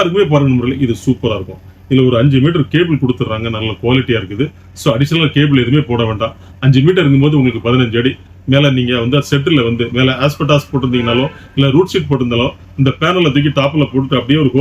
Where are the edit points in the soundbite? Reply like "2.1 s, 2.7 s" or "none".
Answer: none